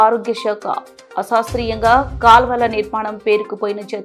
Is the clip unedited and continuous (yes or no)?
yes